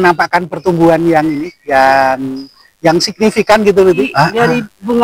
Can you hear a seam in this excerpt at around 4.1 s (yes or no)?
yes